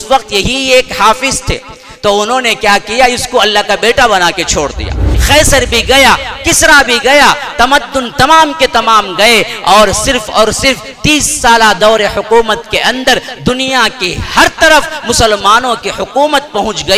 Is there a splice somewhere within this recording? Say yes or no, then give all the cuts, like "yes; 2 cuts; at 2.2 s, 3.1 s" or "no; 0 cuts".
yes; 1 cut; at 5.1 s